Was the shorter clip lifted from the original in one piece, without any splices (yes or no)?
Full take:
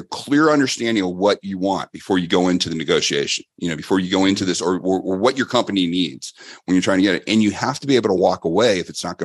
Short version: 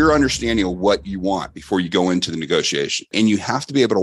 no